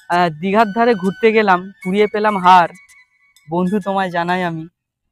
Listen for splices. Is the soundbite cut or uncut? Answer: uncut